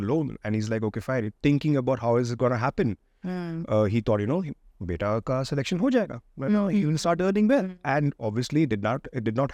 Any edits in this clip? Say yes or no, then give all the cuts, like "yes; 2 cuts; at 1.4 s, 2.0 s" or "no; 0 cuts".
no; 0 cuts